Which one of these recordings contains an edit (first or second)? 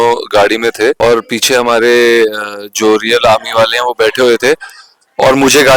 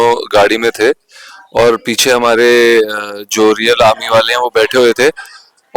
first